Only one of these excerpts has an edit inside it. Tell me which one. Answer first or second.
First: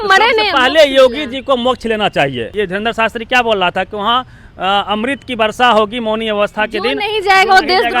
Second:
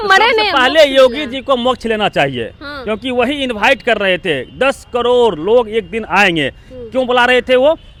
first